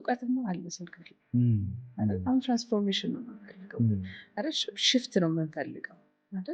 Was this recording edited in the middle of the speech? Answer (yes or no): no